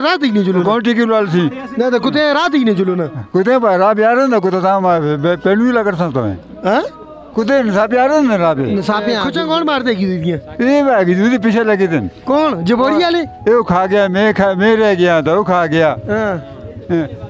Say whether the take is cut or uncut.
cut